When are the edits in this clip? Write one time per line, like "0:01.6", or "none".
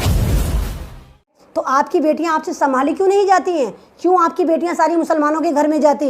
0:01.4